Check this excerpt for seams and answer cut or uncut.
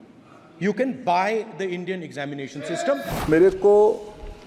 cut